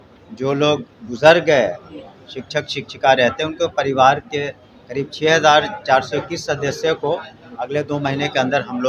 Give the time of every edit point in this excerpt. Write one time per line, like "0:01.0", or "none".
none